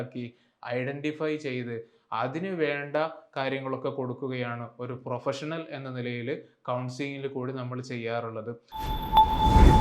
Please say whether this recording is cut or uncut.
cut